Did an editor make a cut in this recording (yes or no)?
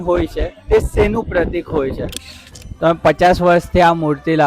yes